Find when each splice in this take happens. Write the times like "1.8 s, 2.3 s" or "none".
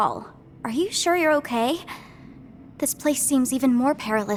none

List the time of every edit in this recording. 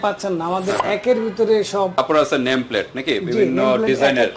1.9 s

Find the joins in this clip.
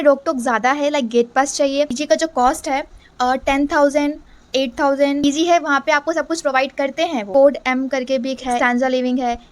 2.0 s, 5.2 s, 7.3 s, 8.6 s

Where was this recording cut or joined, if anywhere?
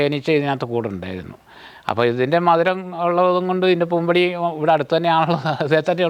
none

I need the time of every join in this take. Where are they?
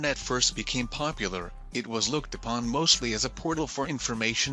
none

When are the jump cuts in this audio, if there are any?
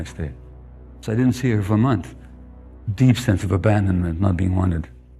0.9 s

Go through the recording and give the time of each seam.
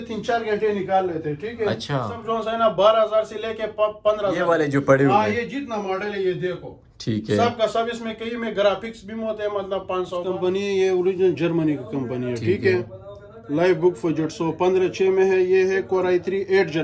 2.2 s, 4.5 s, 10.3 s

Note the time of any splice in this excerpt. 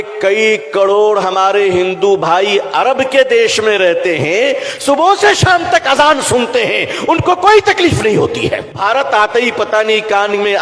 8.7 s

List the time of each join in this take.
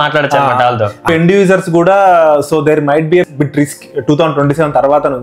1.1 s, 3.3 s

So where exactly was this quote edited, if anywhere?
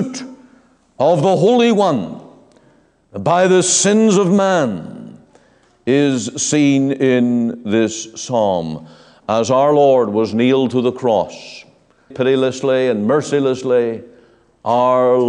12.1 s

